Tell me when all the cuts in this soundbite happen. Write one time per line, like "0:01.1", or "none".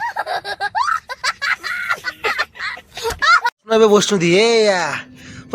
0:03.5

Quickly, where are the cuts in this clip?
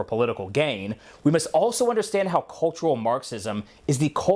none

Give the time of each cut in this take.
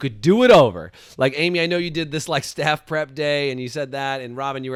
none

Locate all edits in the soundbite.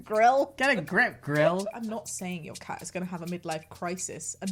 0:01.7

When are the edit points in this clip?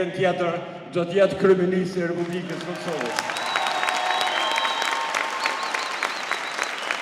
none

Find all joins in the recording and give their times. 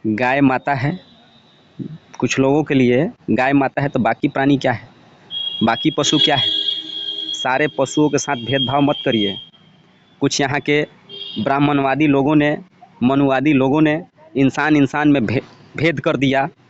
none

